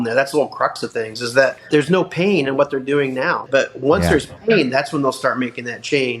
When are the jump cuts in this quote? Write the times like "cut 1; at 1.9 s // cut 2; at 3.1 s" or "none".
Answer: cut 1; at 1.7 s // cut 2; at 3.4 s